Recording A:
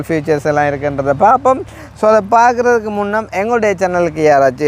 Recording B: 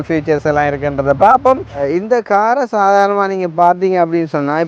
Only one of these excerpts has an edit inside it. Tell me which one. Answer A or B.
B